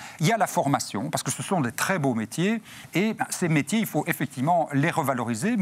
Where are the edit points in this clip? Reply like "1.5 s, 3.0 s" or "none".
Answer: 2.8 s

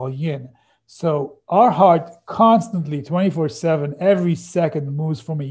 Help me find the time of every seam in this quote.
none

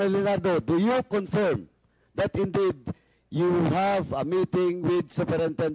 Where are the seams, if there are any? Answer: none

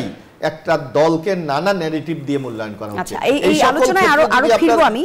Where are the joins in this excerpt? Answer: none

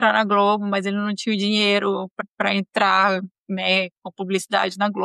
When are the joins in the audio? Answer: 2.2 s

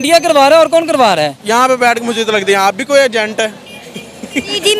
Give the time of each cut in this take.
1.4 s

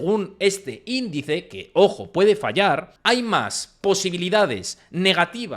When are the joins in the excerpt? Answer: 2.9 s

